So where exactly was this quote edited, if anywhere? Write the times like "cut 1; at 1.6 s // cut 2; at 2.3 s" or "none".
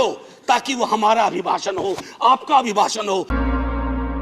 cut 1; at 3.3 s